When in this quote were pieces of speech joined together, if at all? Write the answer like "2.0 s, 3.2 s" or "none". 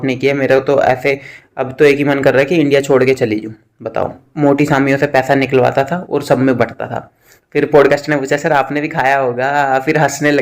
4.2 s